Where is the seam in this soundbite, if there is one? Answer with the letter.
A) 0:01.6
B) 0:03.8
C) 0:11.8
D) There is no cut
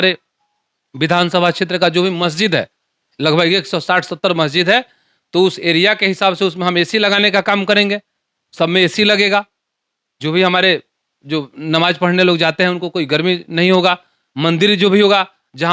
D